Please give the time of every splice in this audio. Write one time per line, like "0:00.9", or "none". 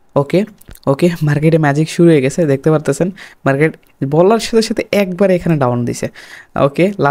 none